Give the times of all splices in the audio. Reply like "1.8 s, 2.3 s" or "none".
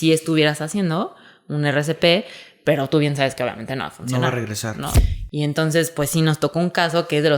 4.9 s